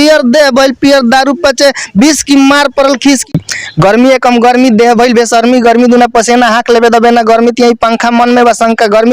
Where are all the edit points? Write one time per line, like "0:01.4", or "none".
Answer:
0:03.3